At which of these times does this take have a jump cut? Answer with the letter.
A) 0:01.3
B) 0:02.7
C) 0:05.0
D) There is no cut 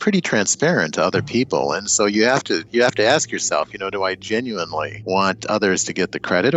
C